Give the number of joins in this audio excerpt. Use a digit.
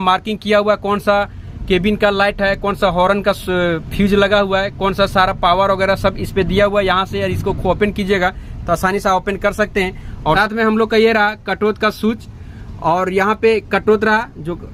0